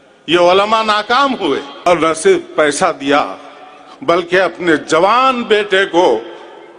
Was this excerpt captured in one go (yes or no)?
no